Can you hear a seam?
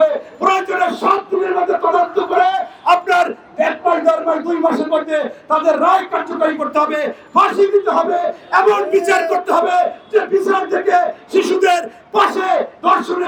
no; 0 cuts

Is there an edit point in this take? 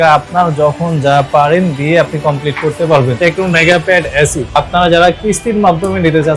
yes; 2 cuts; at 3.1 s, 4.5 s

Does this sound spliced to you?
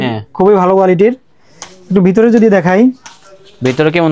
no; 0 cuts

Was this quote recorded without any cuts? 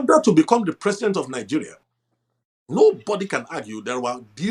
yes; 0 cuts

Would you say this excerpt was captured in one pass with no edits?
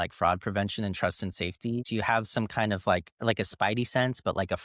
no; 1 cut; at 1.8 s

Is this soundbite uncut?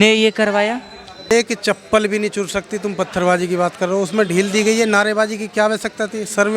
no; 1 cut; at 1.3 s

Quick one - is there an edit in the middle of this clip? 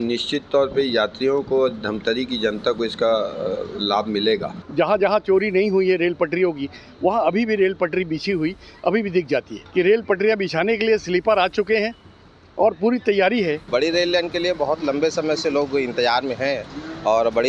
yes; 3 cuts; at 4.6 s, 9.6 s, 13.7 s

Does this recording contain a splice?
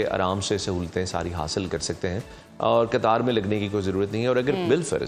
no; 0 cuts

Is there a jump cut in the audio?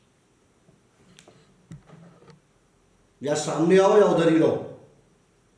no; 0 cuts

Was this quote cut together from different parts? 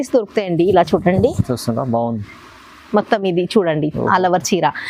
no; 0 cuts

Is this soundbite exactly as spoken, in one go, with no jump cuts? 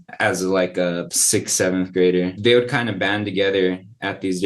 no; 2 cuts; at 1.1 s, 2.4 s

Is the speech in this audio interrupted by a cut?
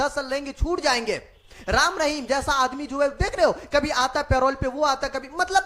no; 0 cuts

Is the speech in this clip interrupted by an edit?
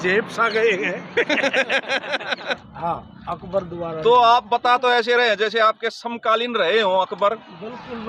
yes; 1 cut; at 2.7 s

